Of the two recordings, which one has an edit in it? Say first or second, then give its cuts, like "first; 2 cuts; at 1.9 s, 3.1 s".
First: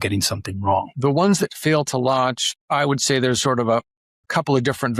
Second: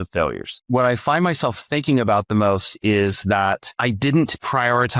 first; 1 cut; at 0.9 s